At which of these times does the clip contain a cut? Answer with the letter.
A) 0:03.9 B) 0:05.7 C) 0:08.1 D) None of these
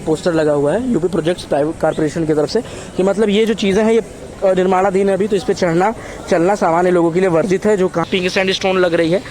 C